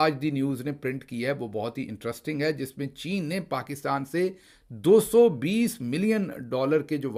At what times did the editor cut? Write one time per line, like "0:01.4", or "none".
none